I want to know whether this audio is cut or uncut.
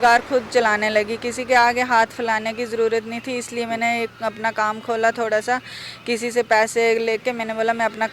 uncut